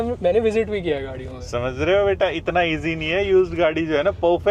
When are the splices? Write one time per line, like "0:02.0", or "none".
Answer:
none